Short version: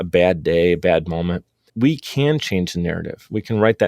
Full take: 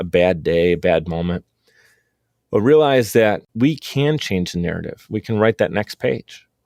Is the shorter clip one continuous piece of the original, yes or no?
no